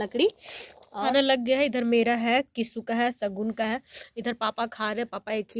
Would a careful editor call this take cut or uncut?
cut